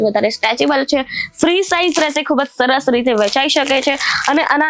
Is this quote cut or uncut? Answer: uncut